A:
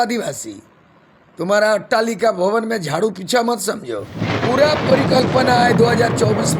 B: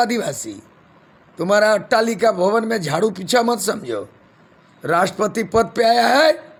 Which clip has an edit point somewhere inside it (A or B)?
A